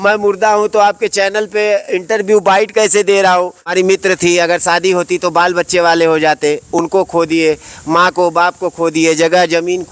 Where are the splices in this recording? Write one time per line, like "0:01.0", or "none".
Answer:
0:03.7